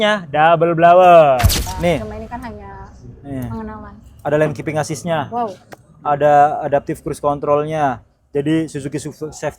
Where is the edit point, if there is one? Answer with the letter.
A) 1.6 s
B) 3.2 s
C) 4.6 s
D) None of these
A